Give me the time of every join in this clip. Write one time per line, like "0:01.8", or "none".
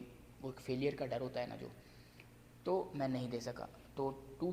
none